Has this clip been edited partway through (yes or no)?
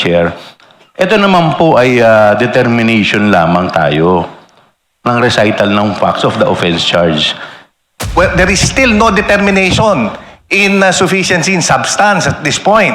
yes